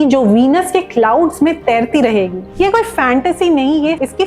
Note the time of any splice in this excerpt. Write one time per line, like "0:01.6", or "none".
0:02.4